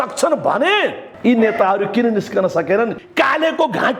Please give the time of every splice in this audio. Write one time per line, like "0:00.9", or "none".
0:01.1
0:03.0